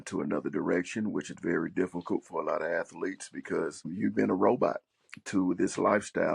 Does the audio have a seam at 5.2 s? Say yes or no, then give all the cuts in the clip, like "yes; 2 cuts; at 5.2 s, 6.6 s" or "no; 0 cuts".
no; 1 cut; at 3.9 s